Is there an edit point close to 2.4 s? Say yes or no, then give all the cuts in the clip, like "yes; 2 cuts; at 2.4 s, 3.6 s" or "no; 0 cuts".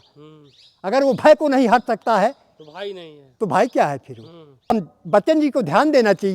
no; 1 cut; at 4.7 s